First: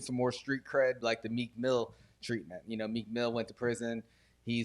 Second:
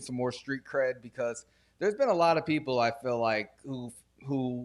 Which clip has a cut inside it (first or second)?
first